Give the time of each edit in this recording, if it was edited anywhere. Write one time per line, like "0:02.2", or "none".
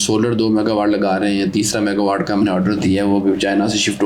none